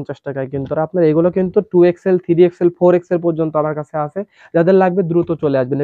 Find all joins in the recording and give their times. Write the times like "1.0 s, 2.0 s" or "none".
none